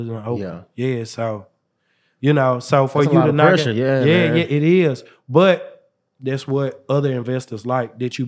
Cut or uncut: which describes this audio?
uncut